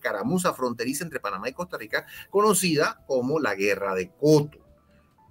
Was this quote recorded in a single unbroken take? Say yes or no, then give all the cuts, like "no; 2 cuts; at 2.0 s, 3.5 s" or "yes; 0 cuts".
yes; 0 cuts